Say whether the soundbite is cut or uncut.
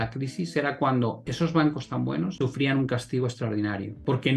uncut